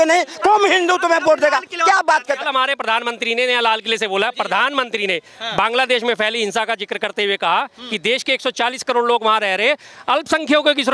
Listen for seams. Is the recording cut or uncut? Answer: cut